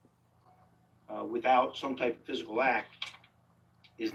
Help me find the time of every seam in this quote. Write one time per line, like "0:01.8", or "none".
none